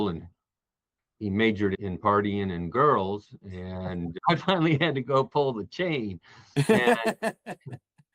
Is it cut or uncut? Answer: uncut